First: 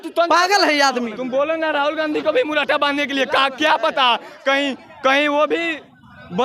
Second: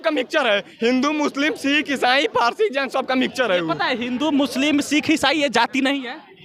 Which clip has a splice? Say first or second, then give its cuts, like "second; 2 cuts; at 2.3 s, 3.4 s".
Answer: first; 1 cut; at 1.1 s